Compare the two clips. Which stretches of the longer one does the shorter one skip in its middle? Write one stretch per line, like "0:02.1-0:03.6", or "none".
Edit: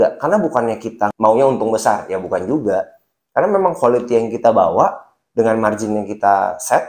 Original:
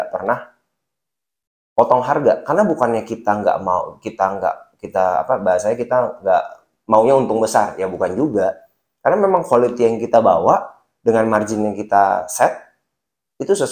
0:03.4-0:06.8